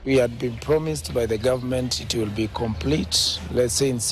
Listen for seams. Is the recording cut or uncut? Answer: uncut